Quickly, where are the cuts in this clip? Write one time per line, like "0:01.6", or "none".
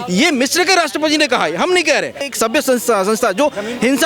0:02.3